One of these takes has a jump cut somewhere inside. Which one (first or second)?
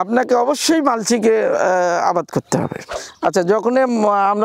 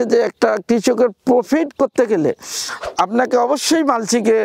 first